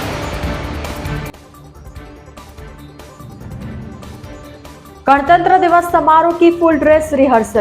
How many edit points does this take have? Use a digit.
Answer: 1